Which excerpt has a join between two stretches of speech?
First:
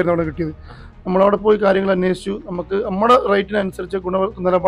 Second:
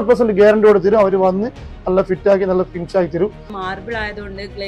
second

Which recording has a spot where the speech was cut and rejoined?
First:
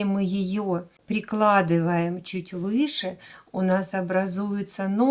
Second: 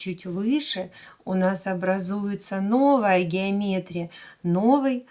first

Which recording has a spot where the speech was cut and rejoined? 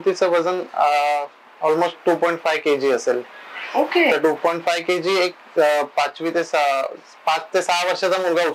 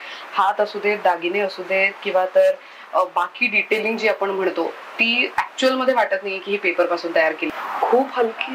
second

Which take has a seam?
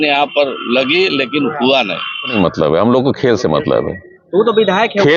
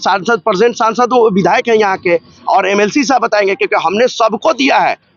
first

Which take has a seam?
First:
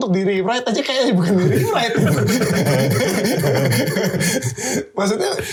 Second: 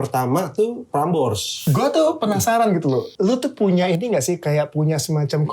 second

